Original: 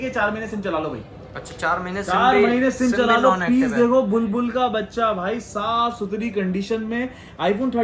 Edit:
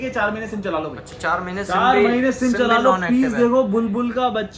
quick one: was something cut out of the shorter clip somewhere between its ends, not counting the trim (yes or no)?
yes